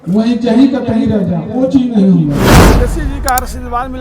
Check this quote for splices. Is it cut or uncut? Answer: cut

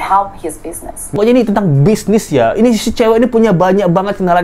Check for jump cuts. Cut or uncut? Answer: cut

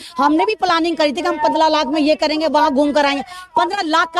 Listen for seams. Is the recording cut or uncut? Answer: uncut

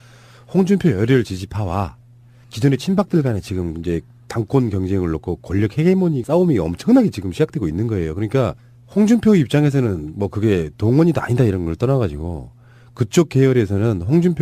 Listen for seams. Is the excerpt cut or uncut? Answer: uncut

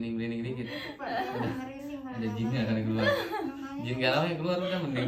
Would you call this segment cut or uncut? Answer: uncut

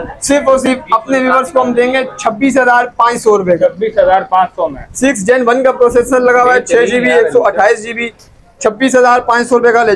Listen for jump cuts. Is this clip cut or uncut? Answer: uncut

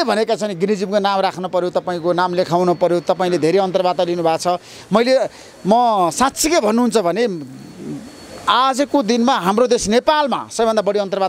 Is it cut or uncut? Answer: uncut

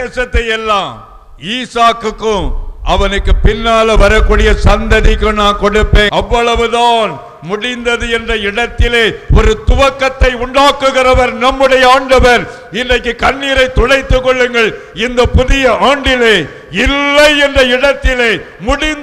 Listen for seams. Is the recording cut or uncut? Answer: cut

